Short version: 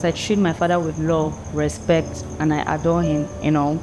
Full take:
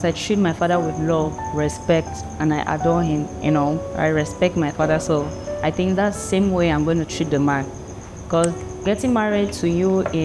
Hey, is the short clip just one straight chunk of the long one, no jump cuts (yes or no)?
yes